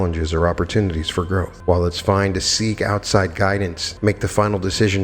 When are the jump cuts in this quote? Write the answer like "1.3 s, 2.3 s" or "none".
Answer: 1.5 s, 3.8 s

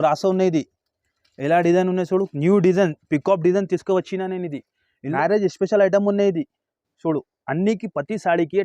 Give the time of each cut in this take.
5.0 s

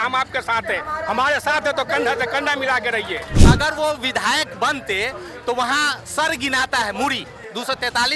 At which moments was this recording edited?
3.3 s

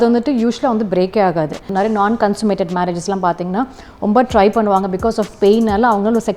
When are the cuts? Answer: 1.6 s

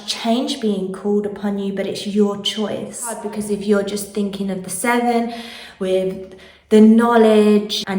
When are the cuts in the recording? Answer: 3.3 s

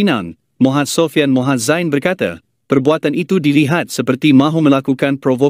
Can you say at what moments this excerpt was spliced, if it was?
none

